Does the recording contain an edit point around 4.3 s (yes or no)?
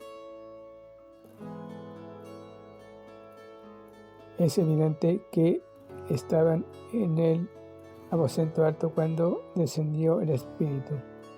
yes